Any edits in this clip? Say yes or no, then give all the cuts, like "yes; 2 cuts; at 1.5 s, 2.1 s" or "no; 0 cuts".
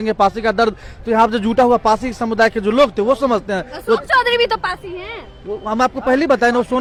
no; 0 cuts